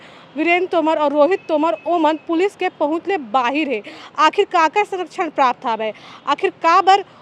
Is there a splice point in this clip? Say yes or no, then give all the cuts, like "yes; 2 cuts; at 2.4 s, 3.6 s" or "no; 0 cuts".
no; 0 cuts